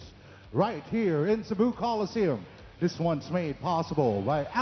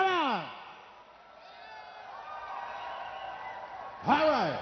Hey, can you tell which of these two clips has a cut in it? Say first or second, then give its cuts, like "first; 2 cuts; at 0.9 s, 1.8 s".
first; 1 cut; at 1.8 s